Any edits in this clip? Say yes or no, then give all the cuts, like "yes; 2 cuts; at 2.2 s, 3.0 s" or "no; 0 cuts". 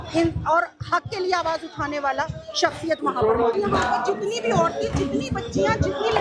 yes; 1 cut; at 3.5 s